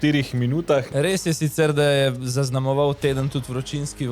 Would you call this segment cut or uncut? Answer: cut